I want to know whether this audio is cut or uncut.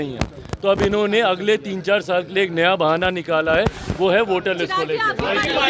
uncut